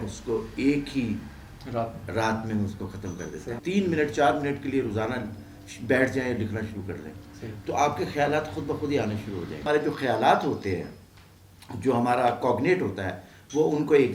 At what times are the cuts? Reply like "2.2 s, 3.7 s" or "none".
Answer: 3.5 s, 9.7 s